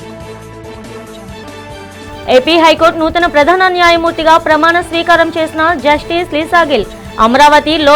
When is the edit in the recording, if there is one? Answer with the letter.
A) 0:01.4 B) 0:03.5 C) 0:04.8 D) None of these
A